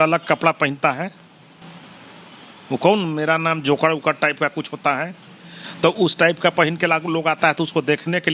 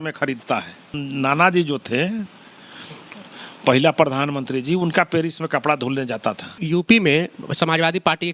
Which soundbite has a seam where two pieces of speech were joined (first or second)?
second